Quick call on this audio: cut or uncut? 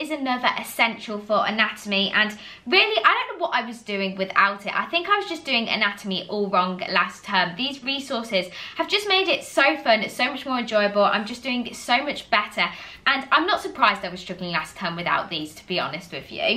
uncut